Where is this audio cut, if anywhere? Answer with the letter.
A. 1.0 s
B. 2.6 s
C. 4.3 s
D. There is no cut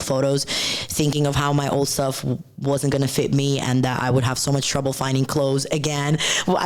D